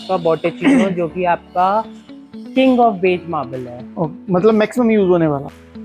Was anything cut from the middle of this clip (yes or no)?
no